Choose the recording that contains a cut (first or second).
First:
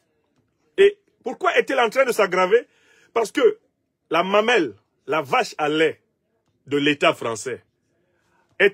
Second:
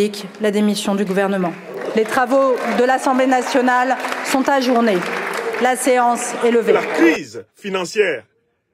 second